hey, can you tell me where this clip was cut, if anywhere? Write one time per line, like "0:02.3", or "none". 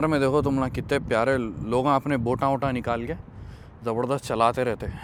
none